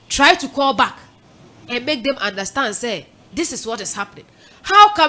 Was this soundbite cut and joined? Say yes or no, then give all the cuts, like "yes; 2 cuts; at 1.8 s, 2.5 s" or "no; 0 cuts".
no; 0 cuts